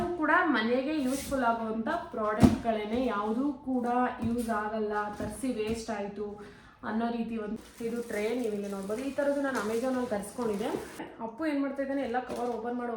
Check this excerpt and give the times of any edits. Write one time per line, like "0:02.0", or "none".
0:07.6
0:11.1